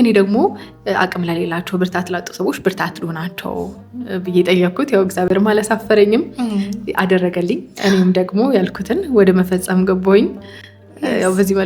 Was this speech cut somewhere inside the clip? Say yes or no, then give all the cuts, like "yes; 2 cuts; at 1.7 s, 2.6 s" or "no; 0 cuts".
no; 0 cuts